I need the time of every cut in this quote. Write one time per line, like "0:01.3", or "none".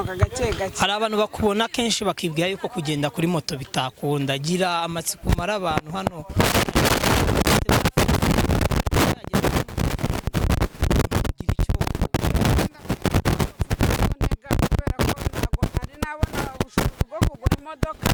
none